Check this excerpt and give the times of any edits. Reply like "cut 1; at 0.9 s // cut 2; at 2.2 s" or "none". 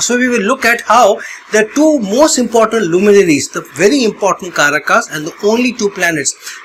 none